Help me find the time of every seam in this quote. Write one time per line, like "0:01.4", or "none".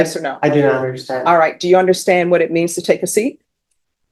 none